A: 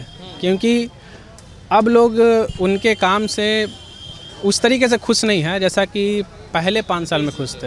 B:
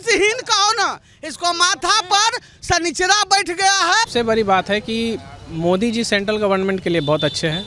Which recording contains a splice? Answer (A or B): B